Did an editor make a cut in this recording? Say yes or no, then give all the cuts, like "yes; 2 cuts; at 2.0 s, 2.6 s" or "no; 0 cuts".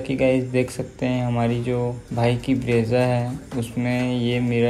yes; 1 cut; at 2.0 s